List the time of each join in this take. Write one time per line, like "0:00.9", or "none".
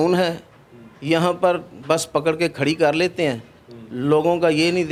none